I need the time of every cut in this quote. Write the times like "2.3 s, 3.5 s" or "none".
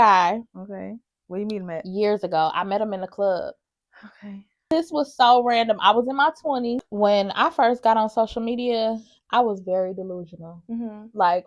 4.6 s, 6.9 s